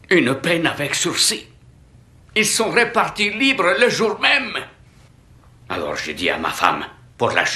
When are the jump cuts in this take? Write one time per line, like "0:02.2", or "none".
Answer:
0:05.5